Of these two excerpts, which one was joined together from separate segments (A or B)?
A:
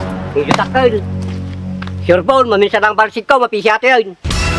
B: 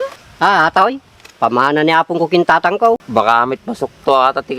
B